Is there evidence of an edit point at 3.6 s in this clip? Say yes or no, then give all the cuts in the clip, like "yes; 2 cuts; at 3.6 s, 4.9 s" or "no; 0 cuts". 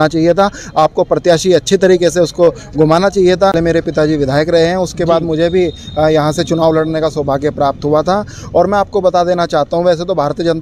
yes; 1 cut; at 3.6 s